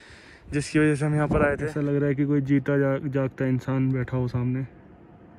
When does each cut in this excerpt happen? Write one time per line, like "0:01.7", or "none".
0:01.7